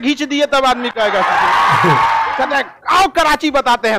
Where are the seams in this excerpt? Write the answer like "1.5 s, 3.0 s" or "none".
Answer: 2.3 s